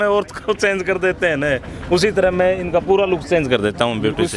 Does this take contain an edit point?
no; 0 cuts

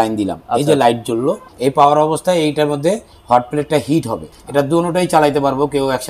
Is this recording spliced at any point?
yes; 2 cuts; at 1.4 s, 4.2 s

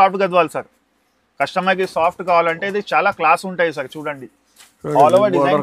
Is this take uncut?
yes; 0 cuts

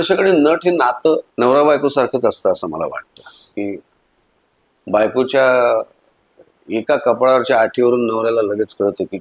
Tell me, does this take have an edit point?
yes; 1 cut; at 1.3 s

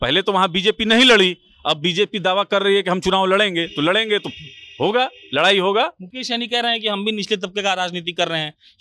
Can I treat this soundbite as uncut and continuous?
yes; 0 cuts

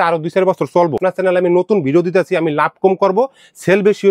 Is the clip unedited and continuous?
no; 1 cut; at 1.0 s

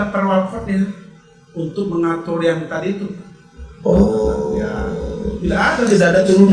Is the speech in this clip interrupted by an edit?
no; 0 cuts

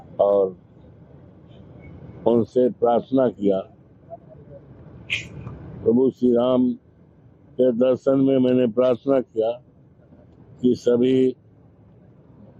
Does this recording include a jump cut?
no; 0 cuts

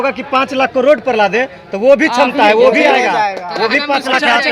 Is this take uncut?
yes; 0 cuts

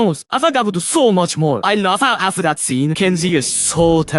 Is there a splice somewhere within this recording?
yes; 2 cuts; at 1.6 s, 2.9 s

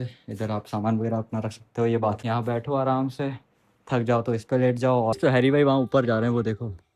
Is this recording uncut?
no; 2 cuts; at 2.2 s, 5.2 s

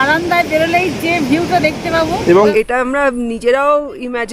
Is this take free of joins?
no; 1 cut; at 2.4 s

